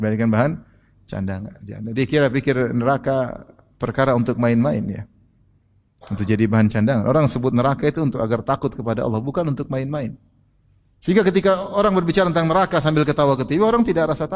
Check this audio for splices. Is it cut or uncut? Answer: uncut